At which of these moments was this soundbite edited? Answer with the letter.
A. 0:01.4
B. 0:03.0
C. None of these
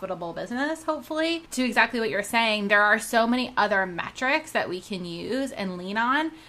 A